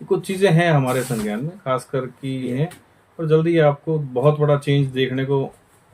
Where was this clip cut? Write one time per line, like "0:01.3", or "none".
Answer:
0:02.5